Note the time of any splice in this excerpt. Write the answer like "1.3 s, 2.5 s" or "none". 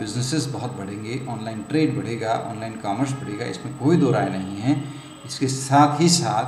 none